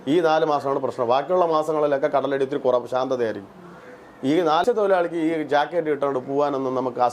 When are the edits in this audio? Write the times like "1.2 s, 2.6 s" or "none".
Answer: 4.6 s